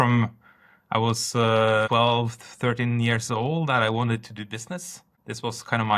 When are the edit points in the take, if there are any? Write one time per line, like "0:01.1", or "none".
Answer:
0:01.9